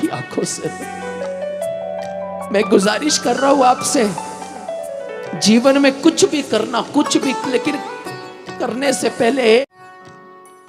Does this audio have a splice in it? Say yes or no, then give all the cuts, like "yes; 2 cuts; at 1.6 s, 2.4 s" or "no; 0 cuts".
yes; 1 cut; at 9.7 s